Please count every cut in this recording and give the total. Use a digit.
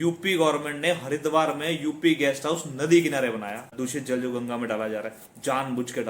1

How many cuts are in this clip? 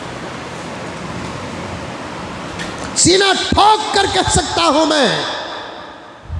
0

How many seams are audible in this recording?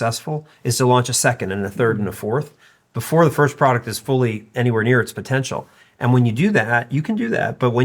0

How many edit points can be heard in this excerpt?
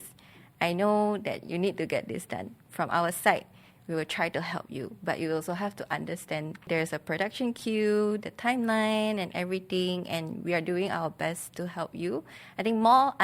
1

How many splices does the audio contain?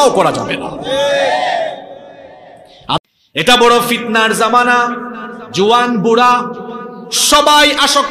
1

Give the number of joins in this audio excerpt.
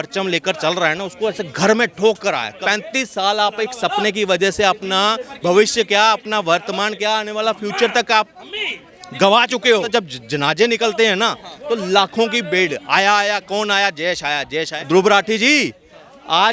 3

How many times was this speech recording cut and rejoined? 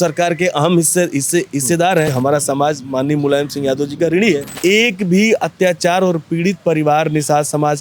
2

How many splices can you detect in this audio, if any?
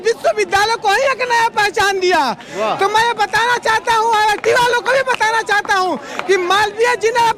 0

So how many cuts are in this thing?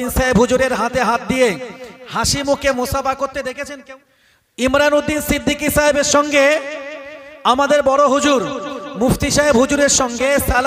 1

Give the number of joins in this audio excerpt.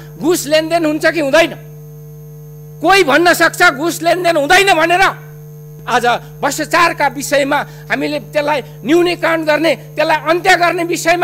1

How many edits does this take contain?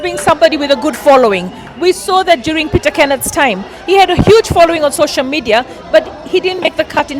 0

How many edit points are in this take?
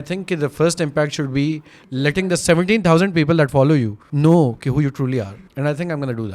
2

